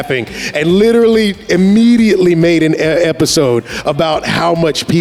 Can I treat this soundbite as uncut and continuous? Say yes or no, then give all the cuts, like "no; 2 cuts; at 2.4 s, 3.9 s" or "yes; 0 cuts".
yes; 0 cuts